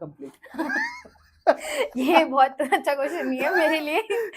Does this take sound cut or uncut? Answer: uncut